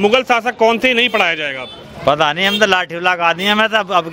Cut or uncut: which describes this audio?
uncut